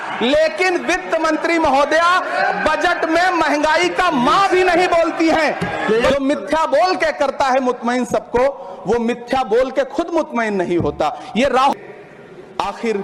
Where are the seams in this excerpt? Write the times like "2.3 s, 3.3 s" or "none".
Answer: 6.1 s, 11.7 s